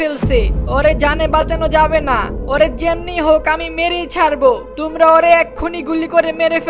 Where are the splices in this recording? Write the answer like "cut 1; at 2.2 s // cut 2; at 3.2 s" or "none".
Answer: none